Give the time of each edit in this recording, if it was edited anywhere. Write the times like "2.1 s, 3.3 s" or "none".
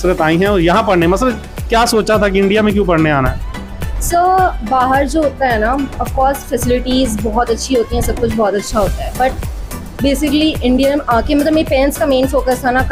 none